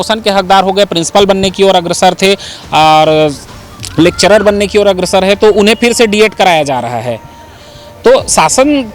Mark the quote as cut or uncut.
uncut